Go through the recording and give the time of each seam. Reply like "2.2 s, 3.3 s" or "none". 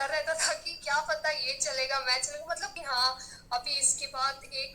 2.7 s